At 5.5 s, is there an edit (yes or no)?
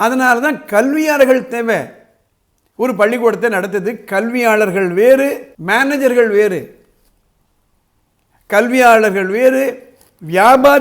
yes